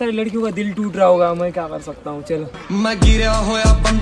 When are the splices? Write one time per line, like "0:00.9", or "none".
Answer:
none